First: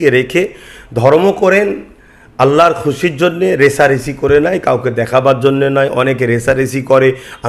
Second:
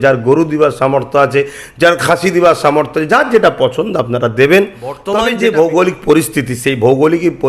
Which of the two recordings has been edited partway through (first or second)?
second